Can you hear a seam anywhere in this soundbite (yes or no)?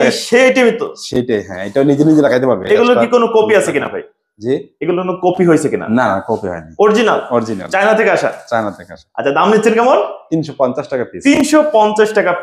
no